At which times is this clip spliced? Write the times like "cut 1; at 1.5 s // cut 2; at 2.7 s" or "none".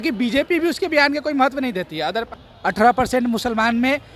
cut 1; at 2.3 s